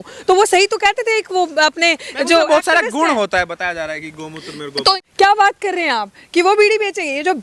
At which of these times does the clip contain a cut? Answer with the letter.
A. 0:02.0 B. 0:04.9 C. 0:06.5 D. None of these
B